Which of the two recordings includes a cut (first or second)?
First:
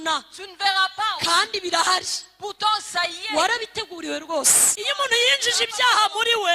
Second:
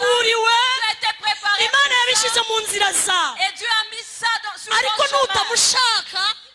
first